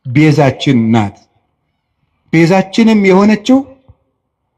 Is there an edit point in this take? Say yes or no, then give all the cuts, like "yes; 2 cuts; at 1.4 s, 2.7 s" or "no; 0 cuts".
no; 0 cuts